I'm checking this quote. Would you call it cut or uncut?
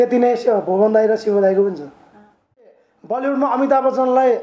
cut